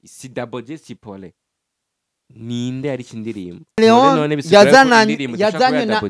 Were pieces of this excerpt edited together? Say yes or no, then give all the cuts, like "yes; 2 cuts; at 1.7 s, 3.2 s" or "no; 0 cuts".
no; 0 cuts